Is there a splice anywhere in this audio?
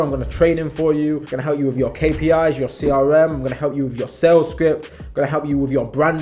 yes; 1 cut; at 1.3 s

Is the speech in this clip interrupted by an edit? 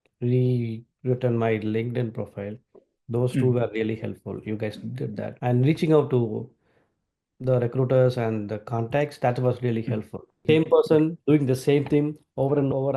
yes; 1 cut; at 10.4 s

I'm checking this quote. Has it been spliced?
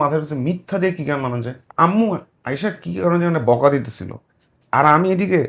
yes; 1 cut; at 1.6 s

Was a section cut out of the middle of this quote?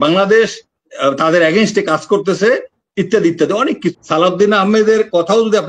yes; 1 cut; at 3.9 s

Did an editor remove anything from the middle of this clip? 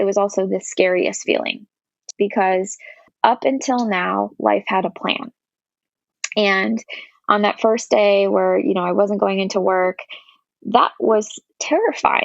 yes; 2 cuts; at 2.1 s, 3.1 s

